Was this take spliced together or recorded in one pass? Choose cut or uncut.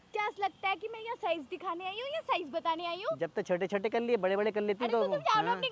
uncut